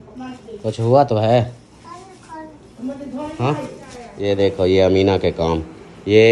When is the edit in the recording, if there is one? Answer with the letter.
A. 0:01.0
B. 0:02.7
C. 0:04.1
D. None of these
C